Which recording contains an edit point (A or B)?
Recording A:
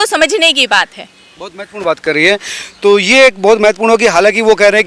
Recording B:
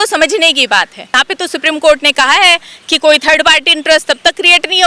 B